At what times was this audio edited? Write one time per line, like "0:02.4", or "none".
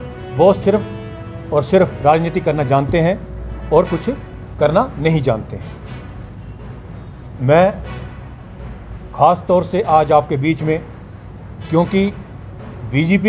0:06.3